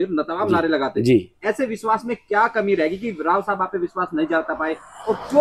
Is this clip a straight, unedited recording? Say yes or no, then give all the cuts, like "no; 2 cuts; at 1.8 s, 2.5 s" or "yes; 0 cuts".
yes; 0 cuts